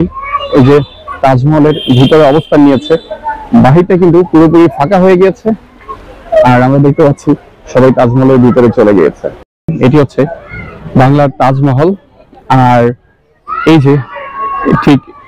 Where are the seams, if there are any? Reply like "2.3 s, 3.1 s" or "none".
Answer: 9.5 s